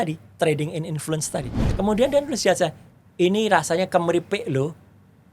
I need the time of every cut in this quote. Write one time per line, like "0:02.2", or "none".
0:01.7